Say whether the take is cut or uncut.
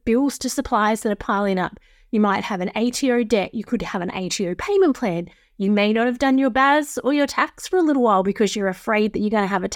uncut